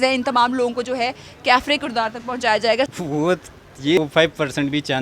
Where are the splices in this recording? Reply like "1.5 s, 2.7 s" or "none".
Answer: 2.9 s, 4.0 s